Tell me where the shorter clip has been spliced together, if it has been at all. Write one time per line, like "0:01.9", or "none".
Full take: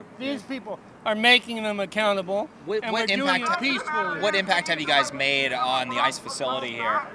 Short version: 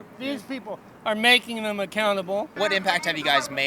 0:02.5